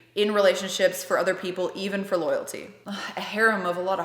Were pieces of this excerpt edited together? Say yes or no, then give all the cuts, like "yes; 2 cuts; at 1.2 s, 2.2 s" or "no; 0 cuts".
yes; 1 cut; at 2.7 s